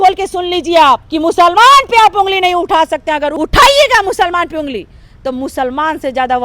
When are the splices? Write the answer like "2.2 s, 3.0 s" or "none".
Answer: 1.1 s, 3.3 s